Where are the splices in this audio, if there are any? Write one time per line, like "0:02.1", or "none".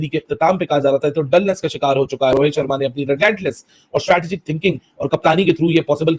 0:02.3